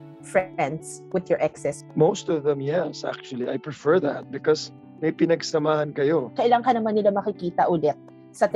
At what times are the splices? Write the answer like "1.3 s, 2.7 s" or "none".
1.8 s, 6.3 s